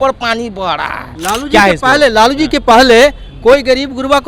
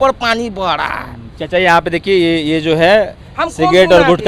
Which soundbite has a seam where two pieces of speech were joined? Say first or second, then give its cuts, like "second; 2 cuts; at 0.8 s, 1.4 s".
first; 1 cut; at 1.1 s